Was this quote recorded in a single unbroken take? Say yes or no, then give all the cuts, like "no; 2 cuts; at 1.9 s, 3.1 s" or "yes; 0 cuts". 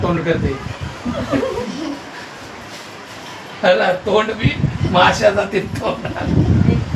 yes; 0 cuts